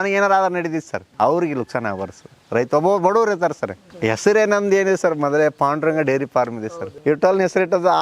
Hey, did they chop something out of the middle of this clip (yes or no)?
yes